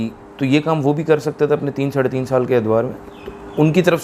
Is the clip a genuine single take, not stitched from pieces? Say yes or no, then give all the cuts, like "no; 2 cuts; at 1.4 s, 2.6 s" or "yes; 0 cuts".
yes; 0 cuts